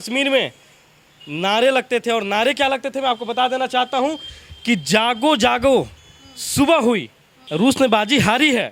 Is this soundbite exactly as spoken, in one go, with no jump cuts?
yes; 0 cuts

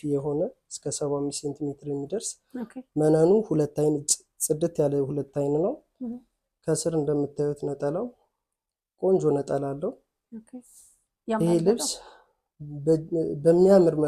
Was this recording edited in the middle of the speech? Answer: no; 0 cuts

